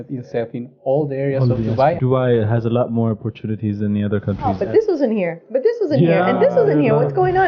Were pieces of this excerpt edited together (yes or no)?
yes